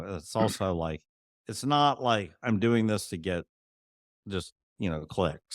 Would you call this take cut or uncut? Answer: uncut